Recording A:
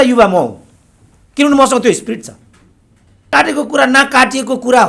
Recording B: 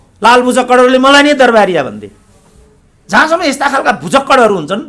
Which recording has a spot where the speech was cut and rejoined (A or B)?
A